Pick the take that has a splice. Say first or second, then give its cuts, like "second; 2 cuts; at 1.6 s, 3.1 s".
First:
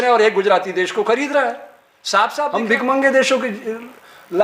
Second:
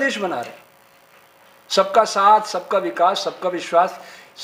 first; 1 cut; at 2.5 s